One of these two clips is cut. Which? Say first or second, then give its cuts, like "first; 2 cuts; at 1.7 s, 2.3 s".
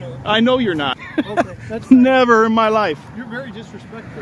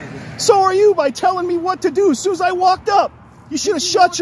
first; 1 cut; at 0.9 s